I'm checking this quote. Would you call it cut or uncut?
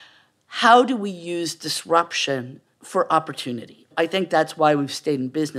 cut